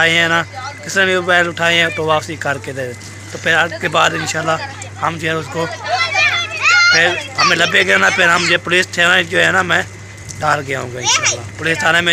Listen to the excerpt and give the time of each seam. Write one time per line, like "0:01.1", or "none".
none

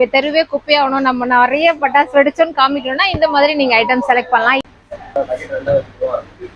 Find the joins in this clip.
0:04.6

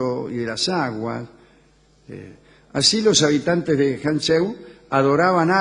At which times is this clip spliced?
none

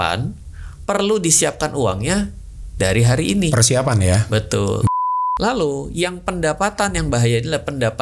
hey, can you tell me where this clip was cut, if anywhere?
0:05.0

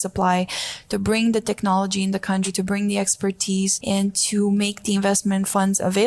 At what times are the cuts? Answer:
0:02.5
0:03.8

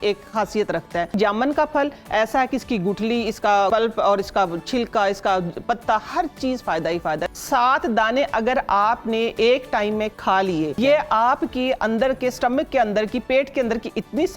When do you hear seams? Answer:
0:01.2
0:03.7
0:07.3
0:10.8

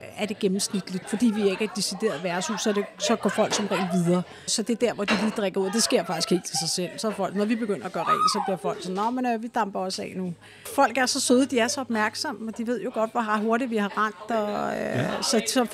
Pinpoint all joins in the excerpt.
0:01.0
0:10.6

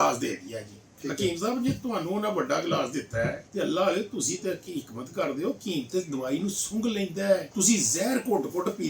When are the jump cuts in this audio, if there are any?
0:03.4
0:07.5

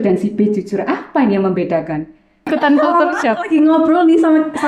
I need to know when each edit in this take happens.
0:02.5

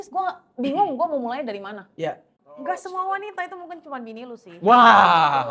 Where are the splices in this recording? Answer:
0:02.4

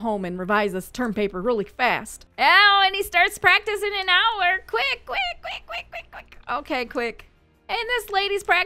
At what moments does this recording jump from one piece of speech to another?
none

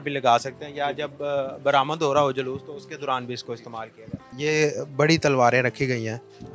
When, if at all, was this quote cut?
0:04.3

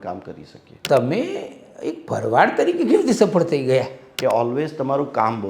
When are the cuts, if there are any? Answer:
0:00.8
0:04.0

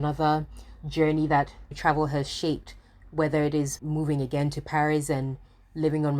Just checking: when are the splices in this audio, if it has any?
0:03.8

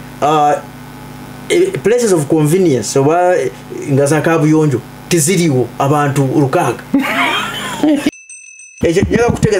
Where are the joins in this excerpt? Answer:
0:08.5

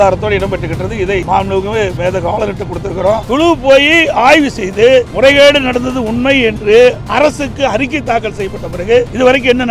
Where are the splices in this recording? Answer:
0:01.2
0:03.2

